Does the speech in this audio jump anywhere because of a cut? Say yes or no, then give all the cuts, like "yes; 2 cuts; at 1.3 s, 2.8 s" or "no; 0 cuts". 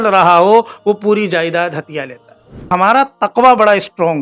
yes; 1 cut; at 2.7 s